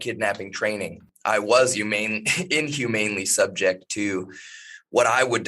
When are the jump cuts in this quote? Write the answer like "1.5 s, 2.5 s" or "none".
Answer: 1.1 s